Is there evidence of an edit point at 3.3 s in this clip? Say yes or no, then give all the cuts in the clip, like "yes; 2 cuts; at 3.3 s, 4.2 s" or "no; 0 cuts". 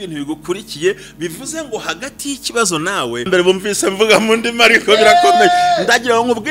yes; 1 cut; at 3.3 s